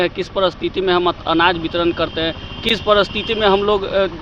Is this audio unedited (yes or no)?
yes